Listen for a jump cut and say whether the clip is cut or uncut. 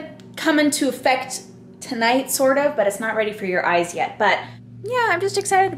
cut